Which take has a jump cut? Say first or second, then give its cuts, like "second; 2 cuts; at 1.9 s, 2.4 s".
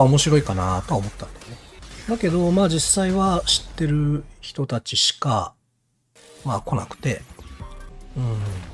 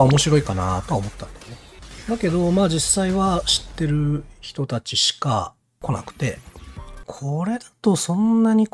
second; 2 cuts; at 5.8 s, 7.1 s